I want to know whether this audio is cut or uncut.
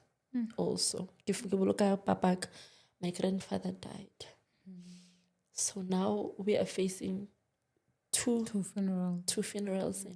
uncut